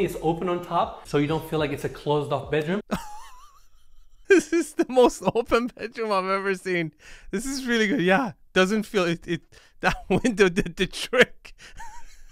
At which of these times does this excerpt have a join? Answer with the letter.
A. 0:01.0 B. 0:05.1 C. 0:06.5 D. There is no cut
A